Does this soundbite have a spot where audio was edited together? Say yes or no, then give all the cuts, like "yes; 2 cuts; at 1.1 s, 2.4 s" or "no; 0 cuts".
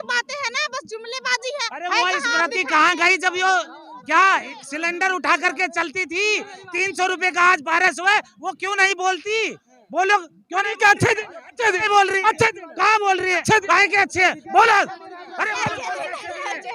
no; 0 cuts